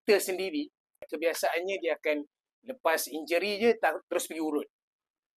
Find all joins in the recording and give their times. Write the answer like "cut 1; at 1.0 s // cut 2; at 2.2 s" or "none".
cut 1; at 1.1 s

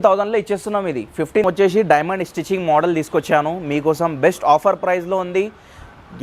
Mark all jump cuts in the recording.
cut 1; at 1.4 s

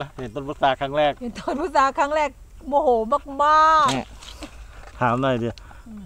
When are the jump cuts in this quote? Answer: cut 1; at 2.5 s // cut 2; at 3.9 s

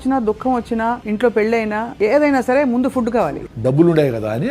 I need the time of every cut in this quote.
cut 1; at 1.0 s // cut 2; at 1.9 s // cut 3; at 3.3 s

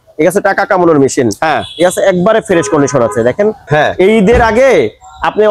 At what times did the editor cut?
cut 1; at 3.6 s

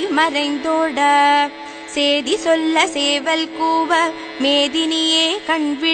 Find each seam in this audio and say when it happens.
cut 1; at 2.6 s

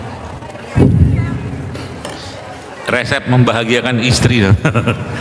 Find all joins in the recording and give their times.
none

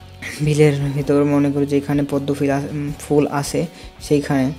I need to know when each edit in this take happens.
none

